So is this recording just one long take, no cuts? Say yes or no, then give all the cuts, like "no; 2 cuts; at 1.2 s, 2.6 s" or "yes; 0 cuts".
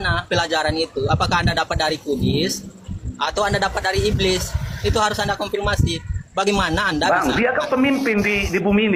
yes; 0 cuts